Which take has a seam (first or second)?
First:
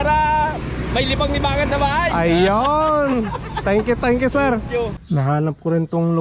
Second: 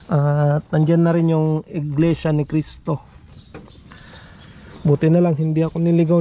first